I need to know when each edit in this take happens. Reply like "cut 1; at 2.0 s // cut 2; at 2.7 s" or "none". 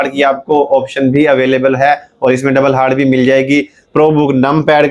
cut 1; at 3.8 s